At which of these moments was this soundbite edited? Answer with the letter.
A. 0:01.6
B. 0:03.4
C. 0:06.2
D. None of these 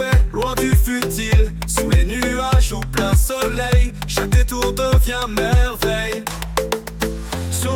A